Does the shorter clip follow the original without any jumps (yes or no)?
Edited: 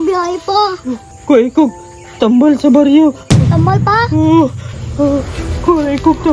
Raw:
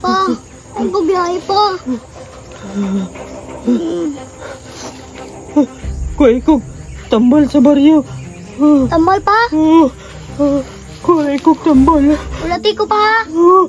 no